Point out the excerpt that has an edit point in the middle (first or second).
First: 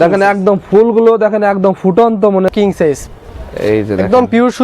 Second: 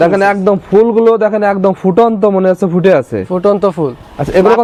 first